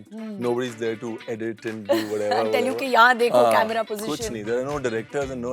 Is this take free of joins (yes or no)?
yes